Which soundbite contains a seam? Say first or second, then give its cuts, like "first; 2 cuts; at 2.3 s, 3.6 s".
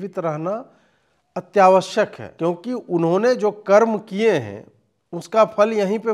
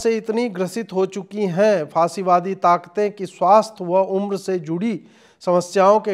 first; 1 cut; at 2.2 s